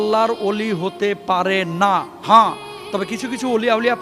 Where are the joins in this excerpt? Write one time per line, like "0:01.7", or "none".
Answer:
none